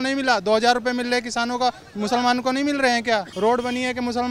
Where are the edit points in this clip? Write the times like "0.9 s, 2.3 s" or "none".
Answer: 3.3 s